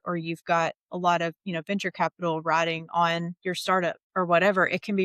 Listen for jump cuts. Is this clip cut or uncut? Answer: cut